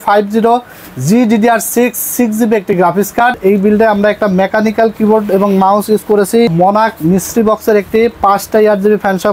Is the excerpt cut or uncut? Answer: cut